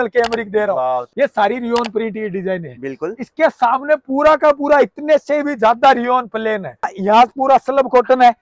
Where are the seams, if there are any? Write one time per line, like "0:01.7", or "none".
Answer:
0:01.1
0:06.9